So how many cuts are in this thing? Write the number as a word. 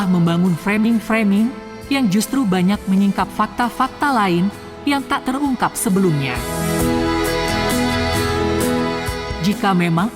zero